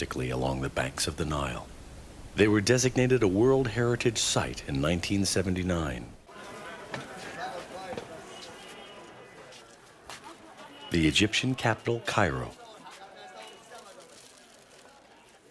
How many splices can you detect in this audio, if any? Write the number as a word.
one